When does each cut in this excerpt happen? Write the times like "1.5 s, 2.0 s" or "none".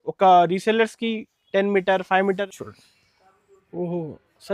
2.6 s